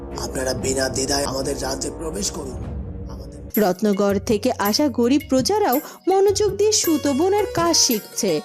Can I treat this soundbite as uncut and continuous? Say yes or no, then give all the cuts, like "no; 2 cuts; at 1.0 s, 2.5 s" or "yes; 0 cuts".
no; 1 cut; at 3.1 s